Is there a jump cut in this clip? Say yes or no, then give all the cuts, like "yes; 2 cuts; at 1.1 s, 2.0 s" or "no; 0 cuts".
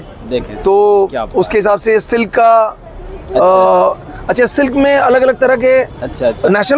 no; 0 cuts